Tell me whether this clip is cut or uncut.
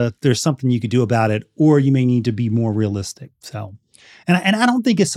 uncut